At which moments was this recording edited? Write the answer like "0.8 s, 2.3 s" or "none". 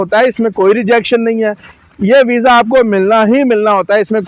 none